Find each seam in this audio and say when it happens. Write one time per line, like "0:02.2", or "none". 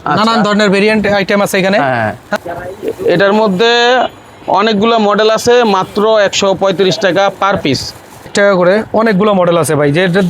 0:02.3
0:08.3